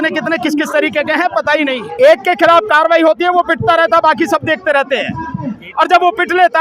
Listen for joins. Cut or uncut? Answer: cut